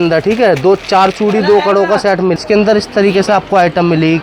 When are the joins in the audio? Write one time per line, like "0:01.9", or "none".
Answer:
0:02.4